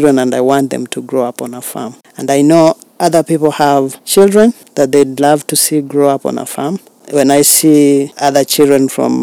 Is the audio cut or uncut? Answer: cut